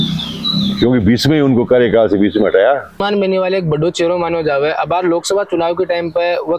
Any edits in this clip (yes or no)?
yes